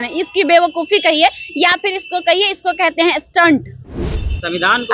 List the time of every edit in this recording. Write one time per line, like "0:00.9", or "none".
0:03.9